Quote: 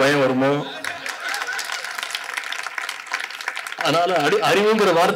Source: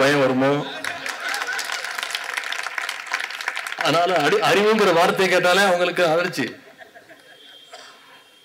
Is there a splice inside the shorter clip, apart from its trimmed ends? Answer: no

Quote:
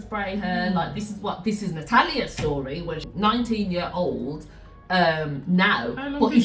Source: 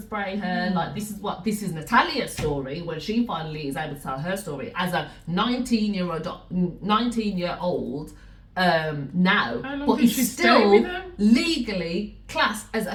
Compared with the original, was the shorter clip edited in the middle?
yes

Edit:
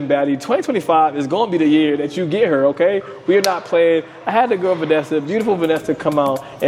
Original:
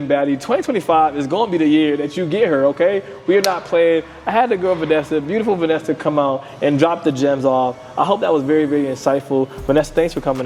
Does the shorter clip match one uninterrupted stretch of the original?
yes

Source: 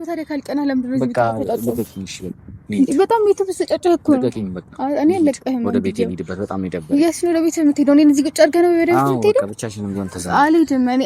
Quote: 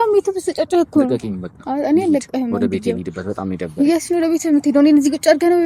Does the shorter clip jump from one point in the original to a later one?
no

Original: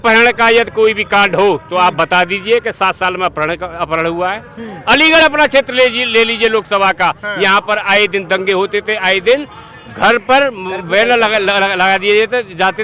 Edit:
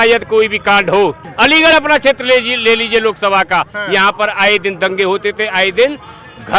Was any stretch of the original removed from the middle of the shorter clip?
yes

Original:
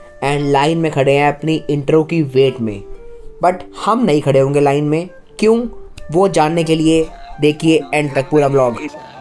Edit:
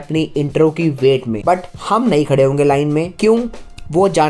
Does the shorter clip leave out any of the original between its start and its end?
yes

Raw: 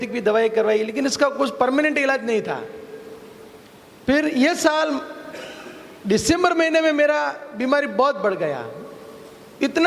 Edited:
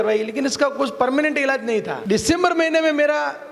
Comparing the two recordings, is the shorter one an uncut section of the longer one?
no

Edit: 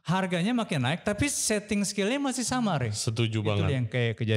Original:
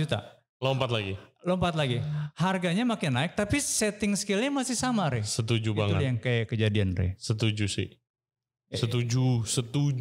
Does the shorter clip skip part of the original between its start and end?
no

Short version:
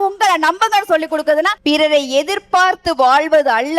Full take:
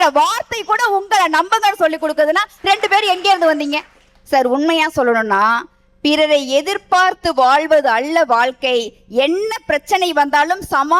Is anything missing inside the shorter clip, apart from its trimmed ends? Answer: yes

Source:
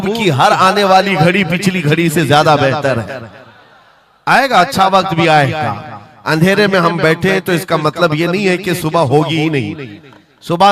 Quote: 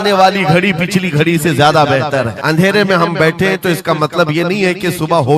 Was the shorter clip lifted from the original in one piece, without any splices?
no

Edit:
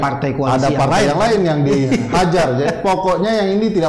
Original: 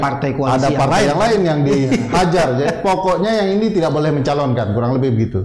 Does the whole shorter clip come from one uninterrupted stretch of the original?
yes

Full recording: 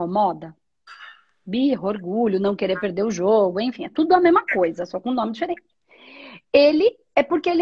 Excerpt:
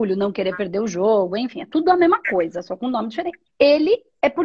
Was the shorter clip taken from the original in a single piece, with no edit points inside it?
no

